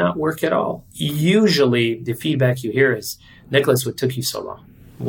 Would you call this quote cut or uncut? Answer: cut